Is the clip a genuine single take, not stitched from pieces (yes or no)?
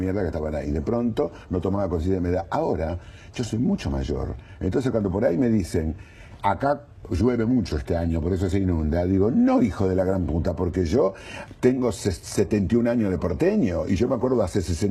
no